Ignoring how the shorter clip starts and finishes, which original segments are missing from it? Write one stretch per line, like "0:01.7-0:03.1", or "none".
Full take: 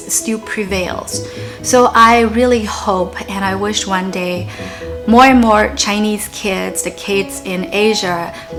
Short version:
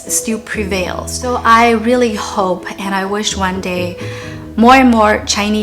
0:01.3-0:01.8